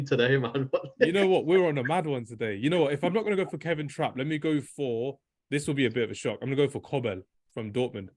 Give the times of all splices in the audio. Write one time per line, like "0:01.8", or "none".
none

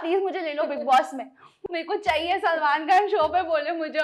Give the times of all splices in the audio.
0:01.5

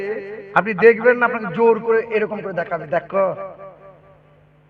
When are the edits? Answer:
none

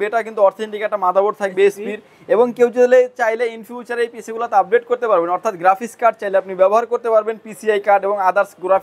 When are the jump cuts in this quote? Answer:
none

